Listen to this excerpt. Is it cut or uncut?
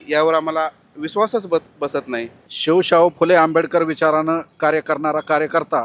cut